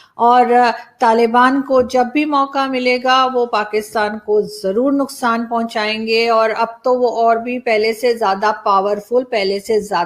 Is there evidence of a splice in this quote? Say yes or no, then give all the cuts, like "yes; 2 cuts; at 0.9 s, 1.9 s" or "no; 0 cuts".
no; 0 cuts